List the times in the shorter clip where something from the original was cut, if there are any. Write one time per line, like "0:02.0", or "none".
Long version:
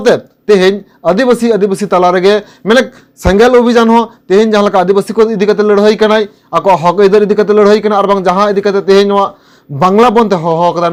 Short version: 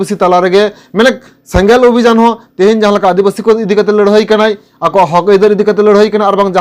none